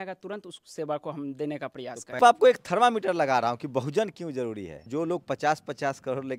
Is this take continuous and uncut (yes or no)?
no